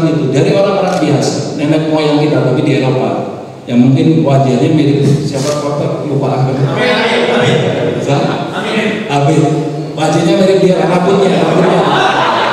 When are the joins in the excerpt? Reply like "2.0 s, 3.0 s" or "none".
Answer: none

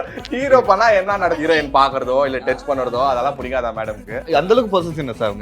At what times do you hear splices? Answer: 1.4 s, 4.3 s

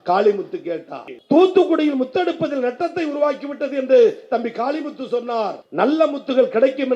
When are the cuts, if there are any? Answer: 1.1 s

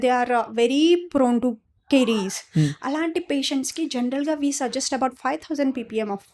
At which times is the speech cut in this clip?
none

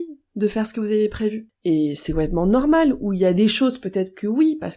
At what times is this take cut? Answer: 1.5 s

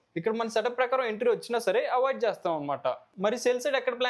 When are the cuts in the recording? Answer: none

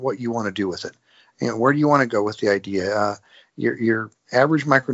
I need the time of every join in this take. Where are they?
none

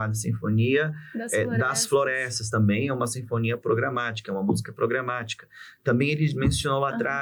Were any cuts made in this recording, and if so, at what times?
none

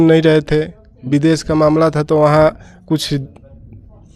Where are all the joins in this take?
none

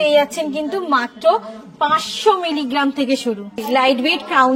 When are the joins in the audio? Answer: 3.6 s

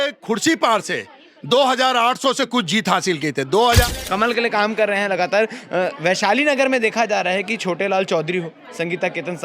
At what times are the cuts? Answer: 3.8 s

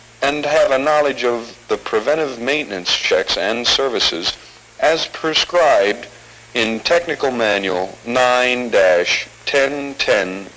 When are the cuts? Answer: 5.4 s

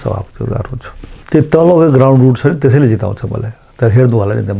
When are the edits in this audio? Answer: 1.1 s

